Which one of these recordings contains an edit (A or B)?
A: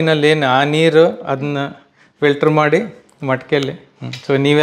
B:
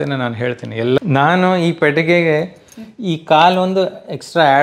B